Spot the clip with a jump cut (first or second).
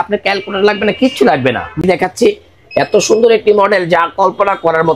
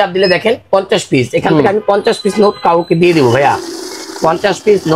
first